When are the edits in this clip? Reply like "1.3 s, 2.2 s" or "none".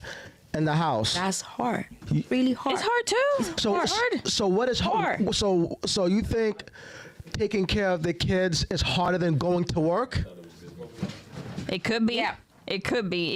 none